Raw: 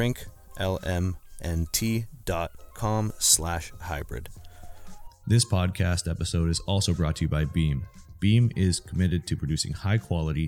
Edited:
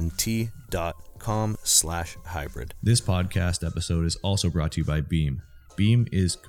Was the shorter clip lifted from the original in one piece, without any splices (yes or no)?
no